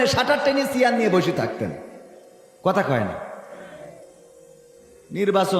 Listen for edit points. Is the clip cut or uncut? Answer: uncut